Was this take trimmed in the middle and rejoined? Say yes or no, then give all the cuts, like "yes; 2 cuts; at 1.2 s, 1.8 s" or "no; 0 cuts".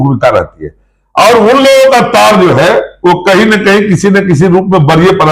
no; 0 cuts